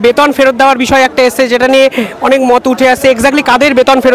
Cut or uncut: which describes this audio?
uncut